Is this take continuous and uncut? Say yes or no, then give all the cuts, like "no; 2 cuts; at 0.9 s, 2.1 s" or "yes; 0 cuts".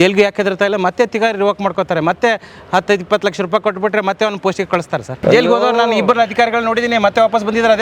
no; 1 cut; at 5.1 s